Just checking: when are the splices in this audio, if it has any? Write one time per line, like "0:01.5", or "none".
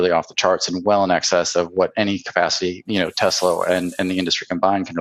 none